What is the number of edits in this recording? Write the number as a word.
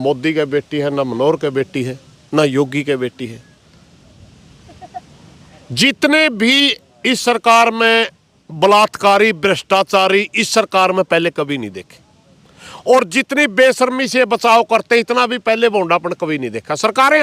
zero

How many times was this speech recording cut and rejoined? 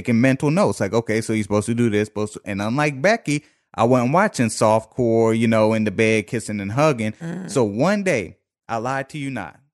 zero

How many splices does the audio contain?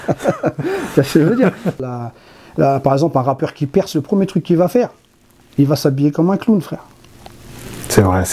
one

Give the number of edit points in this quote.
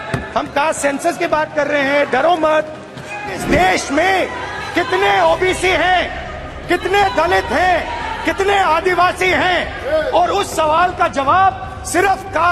one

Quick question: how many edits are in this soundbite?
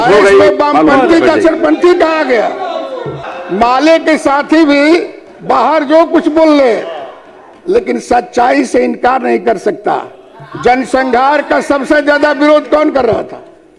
one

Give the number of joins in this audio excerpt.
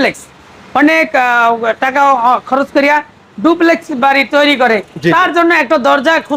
zero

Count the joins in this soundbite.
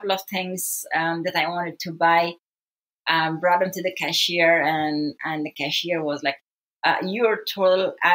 zero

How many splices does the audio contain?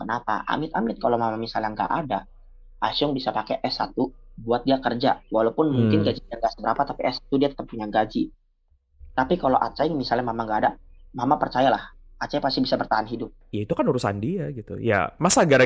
one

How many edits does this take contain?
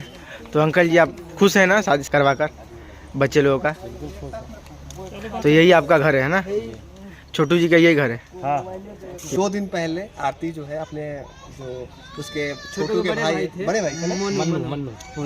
two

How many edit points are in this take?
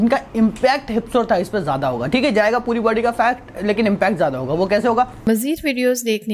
one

